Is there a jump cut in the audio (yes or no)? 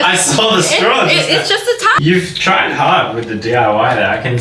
yes